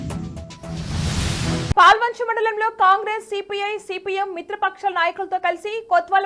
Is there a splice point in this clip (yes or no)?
yes